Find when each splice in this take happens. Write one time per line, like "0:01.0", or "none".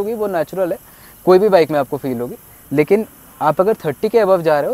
none